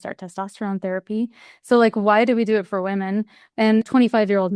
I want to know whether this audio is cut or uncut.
cut